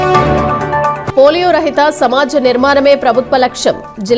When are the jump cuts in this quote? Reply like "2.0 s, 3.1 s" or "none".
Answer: none